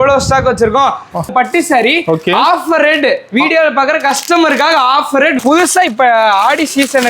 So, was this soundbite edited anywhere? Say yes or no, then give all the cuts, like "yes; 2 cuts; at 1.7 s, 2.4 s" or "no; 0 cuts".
yes; 2 cuts; at 1.3 s, 5.4 s